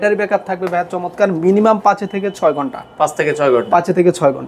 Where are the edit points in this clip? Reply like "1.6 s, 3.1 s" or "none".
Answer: none